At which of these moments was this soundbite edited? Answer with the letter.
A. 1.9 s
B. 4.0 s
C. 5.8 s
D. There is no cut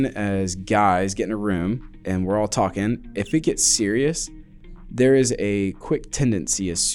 A